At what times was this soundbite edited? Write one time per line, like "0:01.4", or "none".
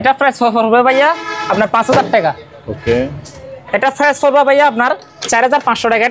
none